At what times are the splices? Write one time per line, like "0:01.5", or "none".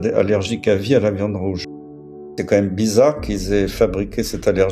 0:01.9